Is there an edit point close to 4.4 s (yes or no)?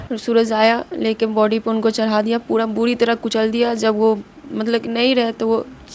no